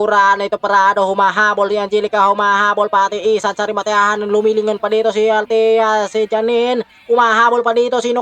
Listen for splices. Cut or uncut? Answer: uncut